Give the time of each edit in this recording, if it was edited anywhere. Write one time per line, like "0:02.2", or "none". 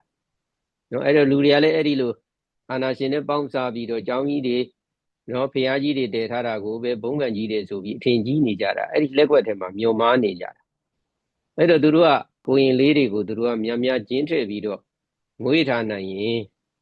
0:12.4